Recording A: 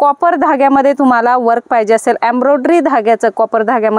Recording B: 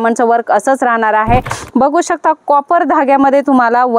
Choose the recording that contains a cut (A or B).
B